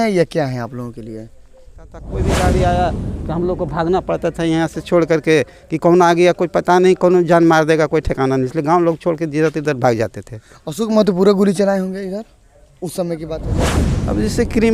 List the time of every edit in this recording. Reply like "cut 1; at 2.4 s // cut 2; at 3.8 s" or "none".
cut 1; at 2.1 s // cut 2; at 13.8 s